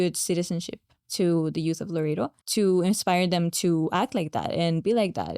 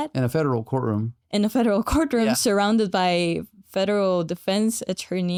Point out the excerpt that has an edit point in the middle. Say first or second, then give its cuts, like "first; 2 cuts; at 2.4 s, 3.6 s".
first; 1 cut; at 2.4 s